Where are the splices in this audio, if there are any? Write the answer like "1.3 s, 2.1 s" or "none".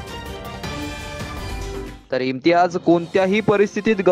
1.9 s